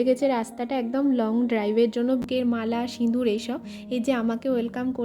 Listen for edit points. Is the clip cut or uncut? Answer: cut